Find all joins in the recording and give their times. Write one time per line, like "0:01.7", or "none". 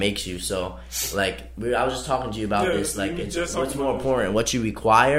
none